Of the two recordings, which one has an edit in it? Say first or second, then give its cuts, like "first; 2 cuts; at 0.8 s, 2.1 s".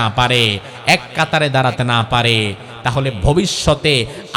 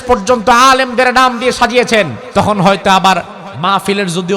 second; 1 cut; at 2.2 s